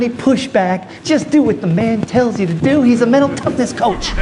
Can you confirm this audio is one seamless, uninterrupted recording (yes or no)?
yes